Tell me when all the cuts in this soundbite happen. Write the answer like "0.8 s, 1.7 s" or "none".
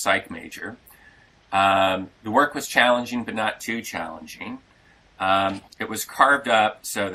none